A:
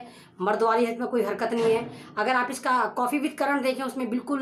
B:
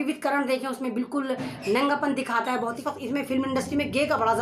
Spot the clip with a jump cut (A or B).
B